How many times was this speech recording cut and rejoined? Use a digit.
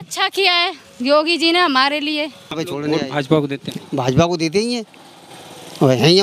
1